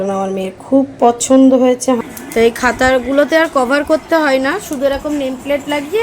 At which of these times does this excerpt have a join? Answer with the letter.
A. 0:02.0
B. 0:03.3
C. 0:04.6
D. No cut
A